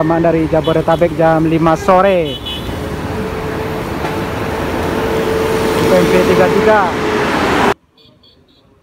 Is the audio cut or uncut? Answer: cut